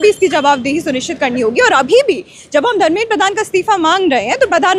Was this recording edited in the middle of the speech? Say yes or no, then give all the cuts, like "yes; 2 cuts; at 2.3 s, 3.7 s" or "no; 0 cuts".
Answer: no; 0 cuts